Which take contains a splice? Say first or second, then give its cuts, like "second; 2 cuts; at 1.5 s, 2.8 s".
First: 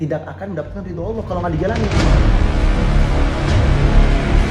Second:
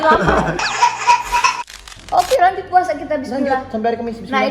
second; 1 cut; at 1.7 s